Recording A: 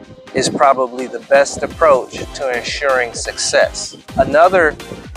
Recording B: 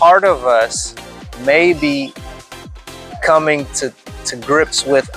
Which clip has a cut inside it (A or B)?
A